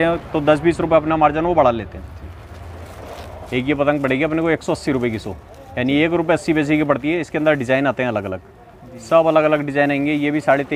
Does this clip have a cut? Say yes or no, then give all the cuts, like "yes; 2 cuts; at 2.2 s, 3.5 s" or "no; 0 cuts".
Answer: no; 0 cuts